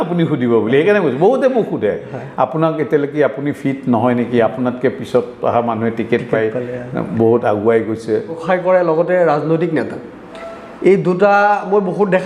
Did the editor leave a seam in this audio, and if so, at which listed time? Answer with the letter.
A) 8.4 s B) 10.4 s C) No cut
A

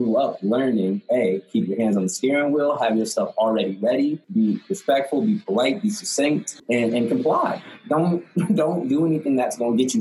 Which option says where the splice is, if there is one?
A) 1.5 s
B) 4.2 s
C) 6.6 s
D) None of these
D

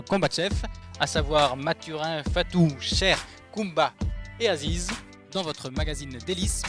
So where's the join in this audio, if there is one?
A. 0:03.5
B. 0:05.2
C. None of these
C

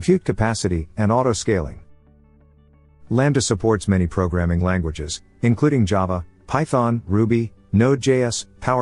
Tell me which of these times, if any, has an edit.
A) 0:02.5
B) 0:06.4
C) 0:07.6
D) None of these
A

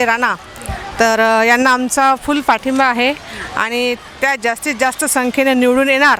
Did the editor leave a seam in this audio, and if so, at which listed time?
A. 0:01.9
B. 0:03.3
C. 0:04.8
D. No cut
D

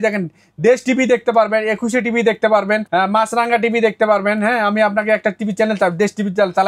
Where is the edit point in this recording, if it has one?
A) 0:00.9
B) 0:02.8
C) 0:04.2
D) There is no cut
B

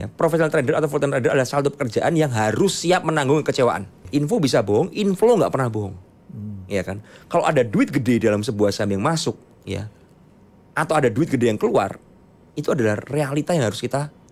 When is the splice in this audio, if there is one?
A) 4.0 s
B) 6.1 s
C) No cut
A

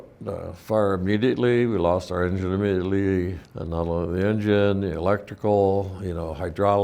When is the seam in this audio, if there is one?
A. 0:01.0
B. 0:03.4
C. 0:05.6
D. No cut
B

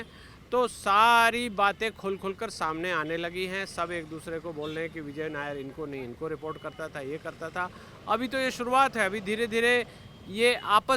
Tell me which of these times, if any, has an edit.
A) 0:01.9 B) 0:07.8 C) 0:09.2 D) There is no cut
D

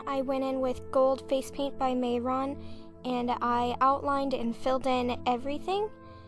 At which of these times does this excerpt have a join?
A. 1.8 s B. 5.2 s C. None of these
A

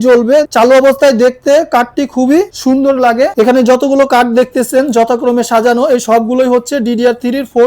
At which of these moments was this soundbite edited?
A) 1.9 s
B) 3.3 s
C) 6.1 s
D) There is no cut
B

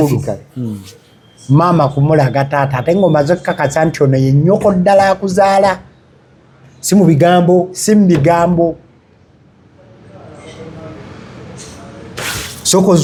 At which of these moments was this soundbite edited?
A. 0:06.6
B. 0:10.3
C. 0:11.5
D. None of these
D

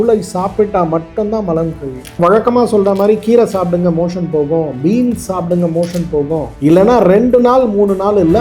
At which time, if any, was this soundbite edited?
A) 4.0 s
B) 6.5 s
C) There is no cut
B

